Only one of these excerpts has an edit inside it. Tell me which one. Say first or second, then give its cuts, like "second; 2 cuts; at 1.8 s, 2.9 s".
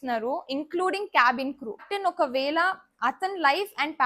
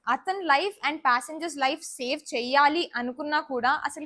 first; 1 cut; at 1.7 s